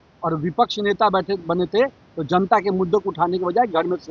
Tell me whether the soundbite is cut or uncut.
uncut